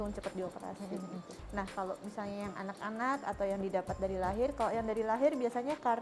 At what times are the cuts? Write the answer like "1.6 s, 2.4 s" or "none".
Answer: 1.3 s

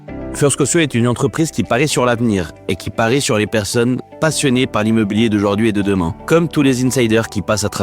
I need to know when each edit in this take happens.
6.2 s

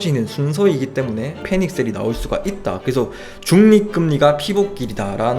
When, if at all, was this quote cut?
1.4 s, 2.8 s

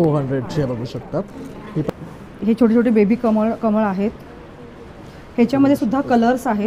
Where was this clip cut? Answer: 1.9 s

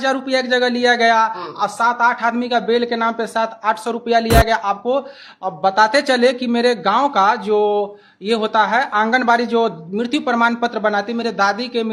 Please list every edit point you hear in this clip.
none

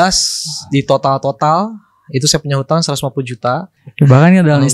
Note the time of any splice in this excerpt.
3.7 s

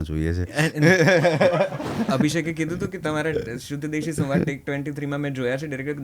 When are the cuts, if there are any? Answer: 2.0 s

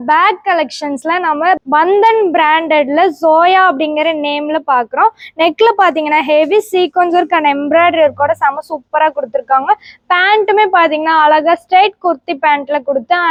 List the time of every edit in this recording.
none

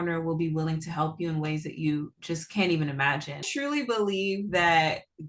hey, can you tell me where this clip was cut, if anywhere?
3.5 s

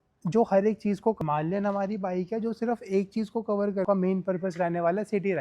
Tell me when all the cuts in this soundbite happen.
1.2 s, 3.8 s

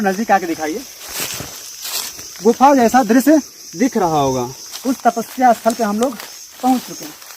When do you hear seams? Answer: 4.6 s

